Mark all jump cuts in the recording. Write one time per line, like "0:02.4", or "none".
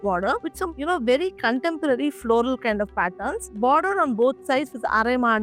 none